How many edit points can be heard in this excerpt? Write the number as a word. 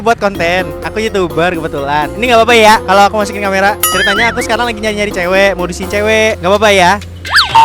zero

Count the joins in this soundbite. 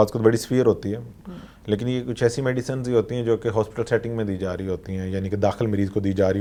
zero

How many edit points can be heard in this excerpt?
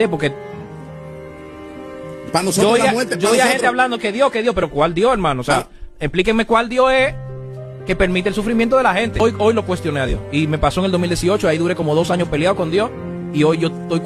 zero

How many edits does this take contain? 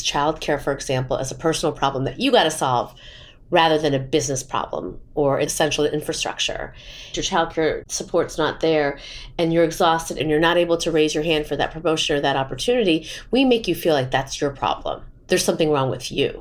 three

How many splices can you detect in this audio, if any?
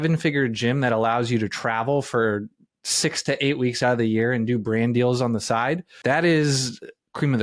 one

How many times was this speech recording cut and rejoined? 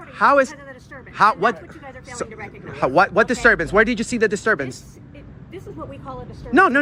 zero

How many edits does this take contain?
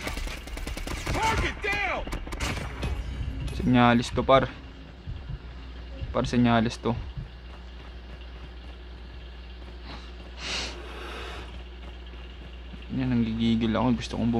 zero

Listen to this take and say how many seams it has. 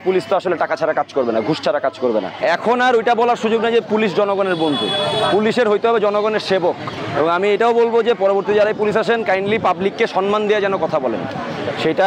two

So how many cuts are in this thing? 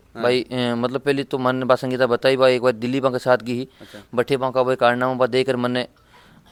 zero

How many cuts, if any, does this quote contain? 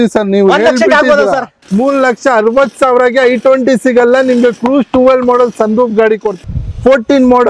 two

